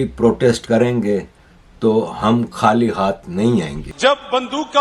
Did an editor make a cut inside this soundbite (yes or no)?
yes